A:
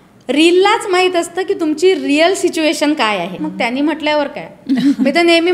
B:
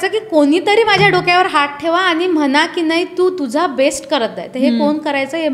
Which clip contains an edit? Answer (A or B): A